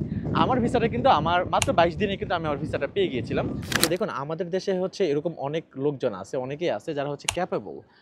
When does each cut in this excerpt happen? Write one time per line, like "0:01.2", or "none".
0:03.7